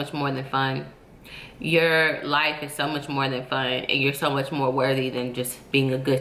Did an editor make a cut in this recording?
no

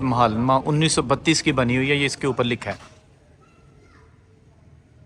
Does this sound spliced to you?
no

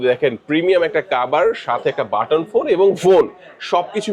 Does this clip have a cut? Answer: no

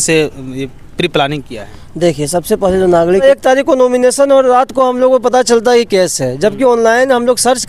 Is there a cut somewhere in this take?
yes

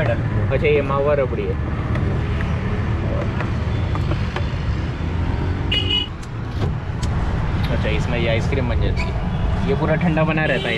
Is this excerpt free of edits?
yes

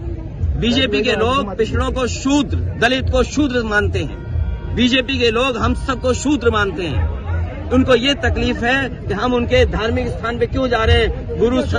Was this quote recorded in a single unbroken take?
yes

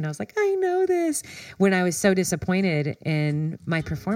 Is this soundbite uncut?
yes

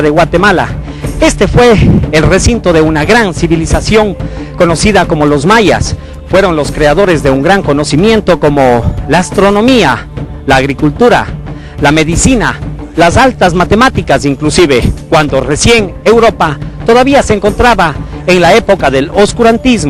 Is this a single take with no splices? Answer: no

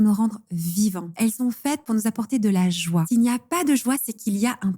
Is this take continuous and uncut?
no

